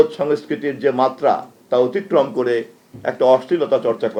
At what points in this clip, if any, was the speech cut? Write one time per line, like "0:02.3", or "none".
none